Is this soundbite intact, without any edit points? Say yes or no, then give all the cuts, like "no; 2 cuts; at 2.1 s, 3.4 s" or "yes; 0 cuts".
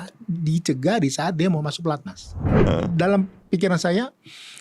no; 1 cut; at 2.5 s